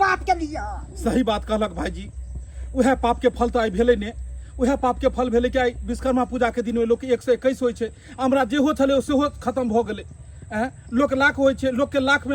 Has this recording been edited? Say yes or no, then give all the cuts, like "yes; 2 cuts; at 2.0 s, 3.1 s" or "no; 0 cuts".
no; 0 cuts